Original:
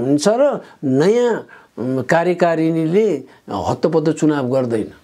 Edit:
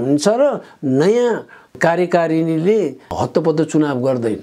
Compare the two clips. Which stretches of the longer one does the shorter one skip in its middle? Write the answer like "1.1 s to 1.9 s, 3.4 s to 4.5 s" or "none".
1.7 s to 2.0 s, 3.3 s to 3.5 s